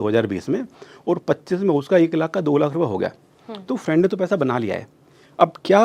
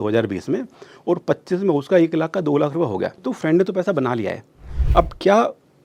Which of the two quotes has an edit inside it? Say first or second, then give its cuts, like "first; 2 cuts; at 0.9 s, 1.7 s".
second; 1 cut; at 3.2 s